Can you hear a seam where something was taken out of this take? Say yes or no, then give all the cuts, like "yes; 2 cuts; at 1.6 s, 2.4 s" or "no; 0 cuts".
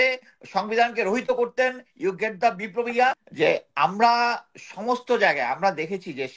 yes; 1 cut; at 3.3 s